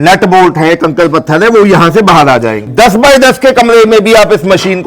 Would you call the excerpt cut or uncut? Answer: cut